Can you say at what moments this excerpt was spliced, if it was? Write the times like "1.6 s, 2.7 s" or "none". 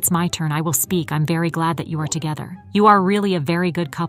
2.5 s